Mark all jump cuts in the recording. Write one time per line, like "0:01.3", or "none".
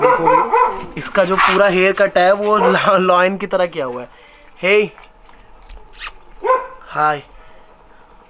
none

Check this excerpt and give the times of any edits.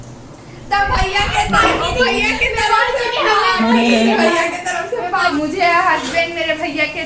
0:05.3

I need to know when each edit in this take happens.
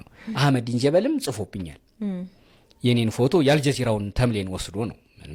none

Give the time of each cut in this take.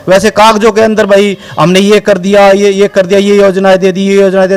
none

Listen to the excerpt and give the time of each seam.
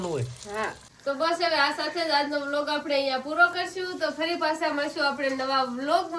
0:01.1

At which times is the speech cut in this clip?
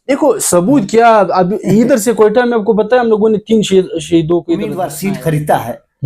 0:04.8

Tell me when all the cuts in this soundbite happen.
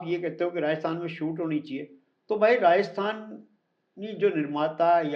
none

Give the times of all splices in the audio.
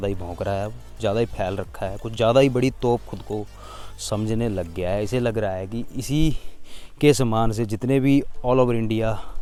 none

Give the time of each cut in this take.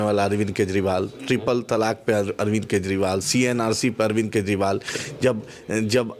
none

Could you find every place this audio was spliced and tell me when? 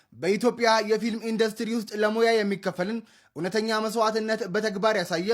none

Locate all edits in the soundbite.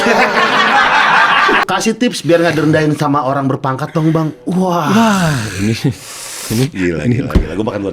0:01.6

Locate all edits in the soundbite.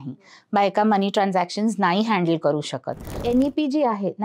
0:03.2

